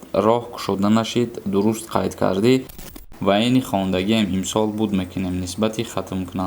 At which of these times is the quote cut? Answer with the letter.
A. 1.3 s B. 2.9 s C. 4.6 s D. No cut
B